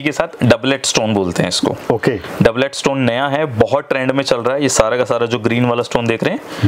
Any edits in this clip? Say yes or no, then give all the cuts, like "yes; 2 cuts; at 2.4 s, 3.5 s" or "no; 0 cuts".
no; 0 cuts